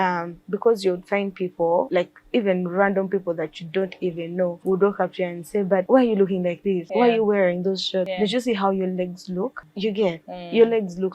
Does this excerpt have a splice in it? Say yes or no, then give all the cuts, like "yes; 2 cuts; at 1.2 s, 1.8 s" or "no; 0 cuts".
yes; 6 cuts; at 1.9 s, 4.6 s, 5.9 s, 6.8 s, 8.1 s, 9.6 s